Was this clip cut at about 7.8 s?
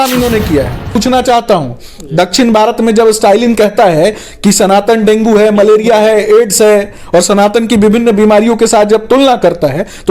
no; 1 cut; at 1.0 s

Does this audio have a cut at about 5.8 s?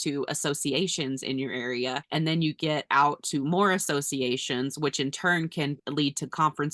yes; 2 cuts; at 2.0 s, 5.8 s

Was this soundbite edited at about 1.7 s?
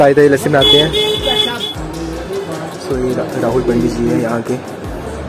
yes; 1 cut; at 1.7 s

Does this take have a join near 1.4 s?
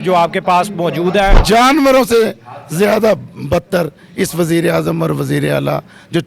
yes; 1 cut; at 1.4 s

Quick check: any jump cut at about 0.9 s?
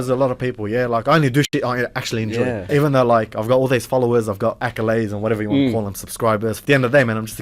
no; 3 cuts; at 2.7 s, 4.6 s, 6.6 s

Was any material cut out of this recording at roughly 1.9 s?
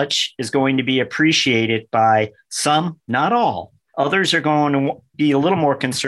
no; 0 cuts

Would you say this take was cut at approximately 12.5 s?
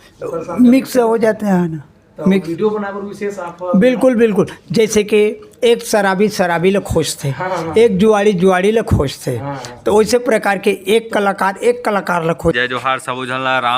yes; 1 cut; at 12.5 s

